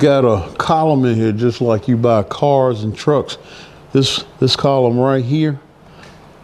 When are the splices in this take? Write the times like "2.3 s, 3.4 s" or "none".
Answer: none